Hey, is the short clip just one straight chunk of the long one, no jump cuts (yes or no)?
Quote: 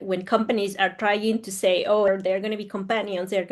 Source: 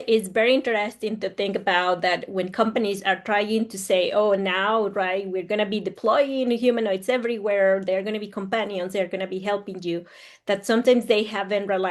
no